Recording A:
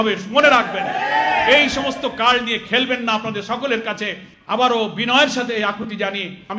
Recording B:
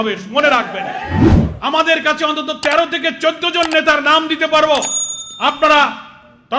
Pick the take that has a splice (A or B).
B